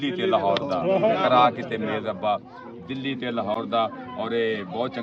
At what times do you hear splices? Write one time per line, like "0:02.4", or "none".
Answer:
none